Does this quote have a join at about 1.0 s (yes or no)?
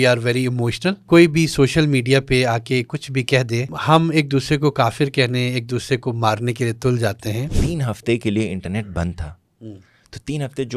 yes